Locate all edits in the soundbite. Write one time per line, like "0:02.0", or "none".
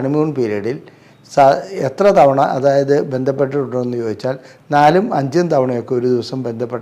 none